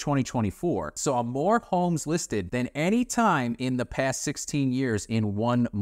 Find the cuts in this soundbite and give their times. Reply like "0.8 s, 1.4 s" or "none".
0.9 s, 2.5 s